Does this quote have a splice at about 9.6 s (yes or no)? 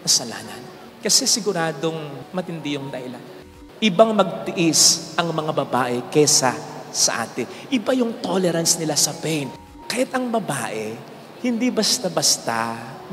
yes